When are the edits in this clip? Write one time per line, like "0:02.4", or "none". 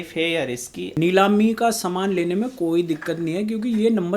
0:01.0